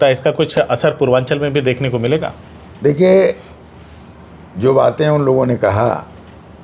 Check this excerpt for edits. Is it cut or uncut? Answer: uncut